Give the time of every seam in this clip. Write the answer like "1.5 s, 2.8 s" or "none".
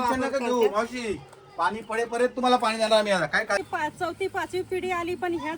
3.6 s